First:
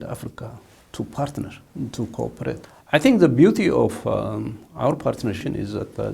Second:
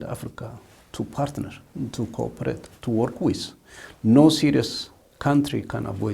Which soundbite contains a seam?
first; 2 cuts; at 2.7 s, 5.4 s

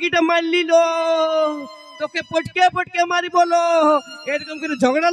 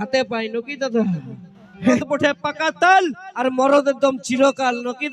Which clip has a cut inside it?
second; 1 cut; at 2.0 s

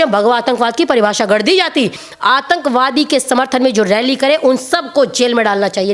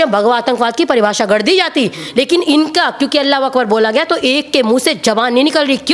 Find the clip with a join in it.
first; 1 cut; at 2.0 s

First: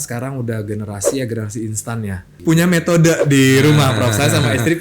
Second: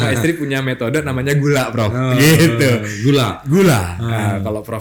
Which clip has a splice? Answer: first; 1 cut; at 2.4 s

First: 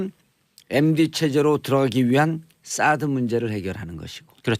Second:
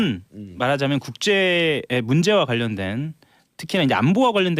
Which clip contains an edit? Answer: second; 1 cut; at 3.4 s

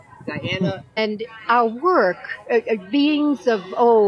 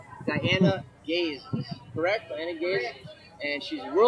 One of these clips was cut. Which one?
second; 1 cut; at 1.0 s

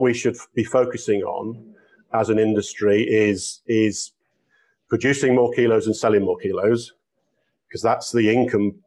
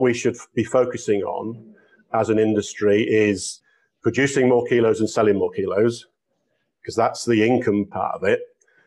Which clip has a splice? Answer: second; 2 cuts; at 3.5 s, 7.9 s

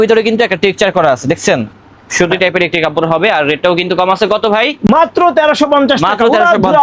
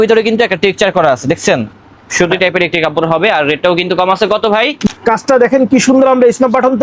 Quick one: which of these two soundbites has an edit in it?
second; 1 cut; at 4.8 s

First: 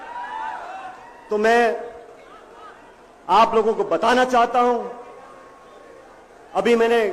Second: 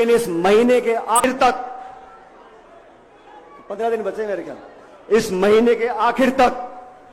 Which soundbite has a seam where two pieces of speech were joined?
second; 1 cut; at 1.2 s

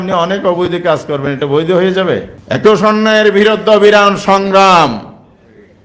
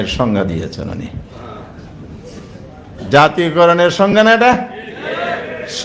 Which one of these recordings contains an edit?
first; 1 cut; at 2.3 s

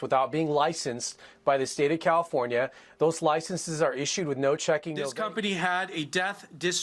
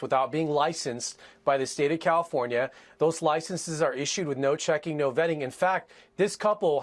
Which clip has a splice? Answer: first; 1 cut; at 5.1 s

